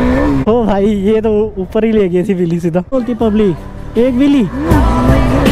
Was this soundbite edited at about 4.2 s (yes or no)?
no